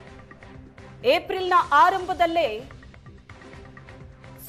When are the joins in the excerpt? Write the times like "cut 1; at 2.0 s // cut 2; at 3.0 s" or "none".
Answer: cut 1; at 1.0 s